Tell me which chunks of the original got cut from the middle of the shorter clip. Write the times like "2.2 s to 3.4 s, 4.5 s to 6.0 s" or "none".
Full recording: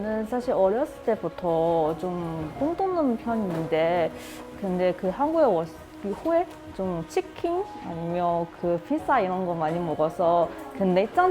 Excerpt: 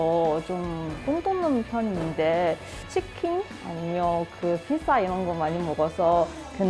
4.3 s to 7.0 s